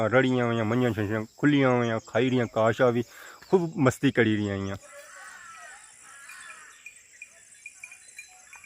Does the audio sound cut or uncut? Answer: cut